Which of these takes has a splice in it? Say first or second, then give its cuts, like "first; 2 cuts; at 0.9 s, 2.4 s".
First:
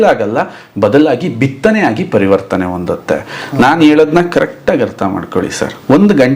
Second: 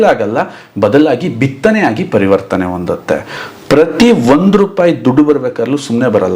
second; 1 cut; at 3.4 s